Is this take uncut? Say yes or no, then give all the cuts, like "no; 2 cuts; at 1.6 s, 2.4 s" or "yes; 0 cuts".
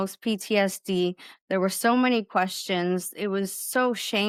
yes; 0 cuts